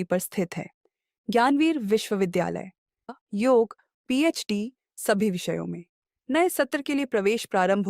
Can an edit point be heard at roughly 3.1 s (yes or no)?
yes